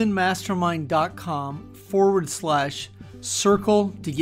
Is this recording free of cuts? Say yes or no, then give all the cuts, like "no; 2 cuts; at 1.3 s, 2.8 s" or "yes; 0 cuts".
yes; 0 cuts